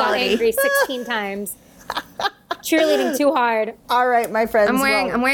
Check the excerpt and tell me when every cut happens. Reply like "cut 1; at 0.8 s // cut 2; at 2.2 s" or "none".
cut 1; at 3.8 s